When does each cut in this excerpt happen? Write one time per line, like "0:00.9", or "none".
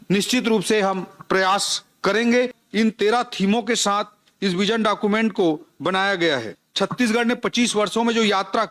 0:02.6
0:06.6